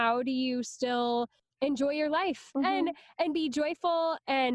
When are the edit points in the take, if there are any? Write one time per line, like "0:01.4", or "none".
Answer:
0:02.5